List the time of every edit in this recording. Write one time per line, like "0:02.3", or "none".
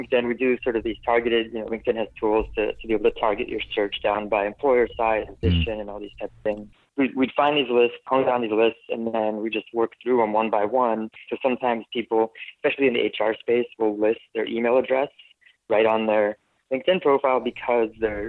0:05.4
0:06.7
0:08.0
0:11.3